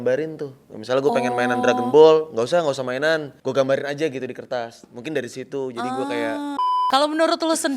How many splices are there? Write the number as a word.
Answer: two